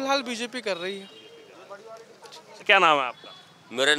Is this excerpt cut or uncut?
uncut